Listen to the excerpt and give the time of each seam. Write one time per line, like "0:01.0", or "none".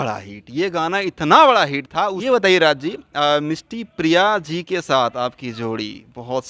0:02.2